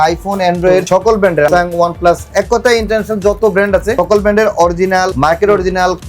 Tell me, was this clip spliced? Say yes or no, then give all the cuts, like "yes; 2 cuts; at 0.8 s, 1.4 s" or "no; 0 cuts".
yes; 3 cuts; at 1.3 s, 4.0 s, 5.1 s